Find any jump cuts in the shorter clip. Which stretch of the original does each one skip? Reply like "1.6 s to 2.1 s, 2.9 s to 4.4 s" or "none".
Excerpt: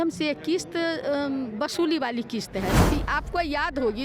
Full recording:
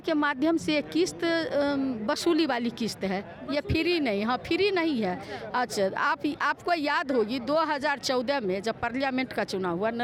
3.3 s to 6.2 s